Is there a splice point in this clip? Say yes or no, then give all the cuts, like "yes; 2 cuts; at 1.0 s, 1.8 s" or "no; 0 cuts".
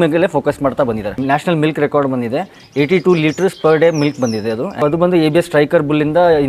yes; 2 cuts; at 1.2 s, 4.8 s